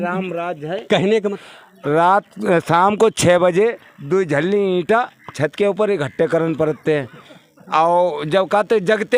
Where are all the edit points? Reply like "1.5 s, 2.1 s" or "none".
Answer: 1.4 s